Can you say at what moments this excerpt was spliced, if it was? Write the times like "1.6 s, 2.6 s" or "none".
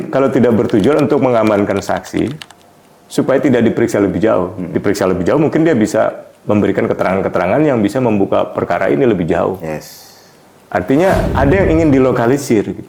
none